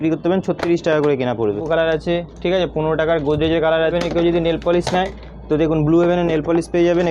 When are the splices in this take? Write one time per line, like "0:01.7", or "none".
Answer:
0:01.6
0:03.9